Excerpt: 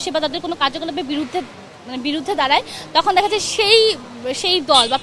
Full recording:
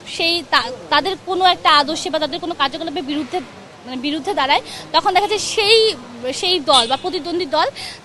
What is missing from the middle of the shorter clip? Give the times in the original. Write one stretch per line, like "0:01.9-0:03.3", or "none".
none